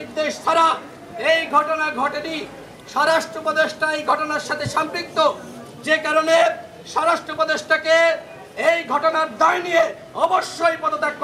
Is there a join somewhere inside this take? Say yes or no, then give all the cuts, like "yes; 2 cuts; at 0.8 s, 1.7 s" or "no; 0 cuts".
no; 0 cuts